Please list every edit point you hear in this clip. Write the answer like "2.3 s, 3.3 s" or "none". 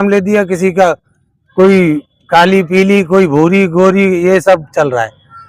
none